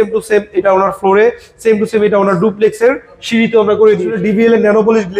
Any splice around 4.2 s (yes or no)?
yes